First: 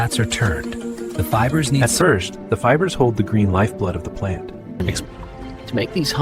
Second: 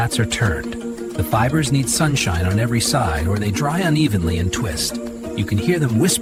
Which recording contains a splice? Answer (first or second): first